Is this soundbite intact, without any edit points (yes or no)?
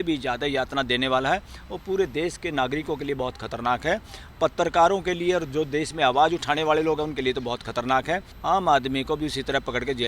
no